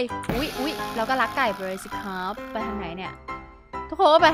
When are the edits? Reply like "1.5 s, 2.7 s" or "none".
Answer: 3.3 s